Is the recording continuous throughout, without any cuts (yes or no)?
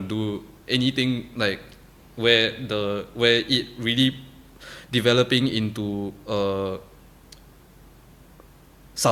yes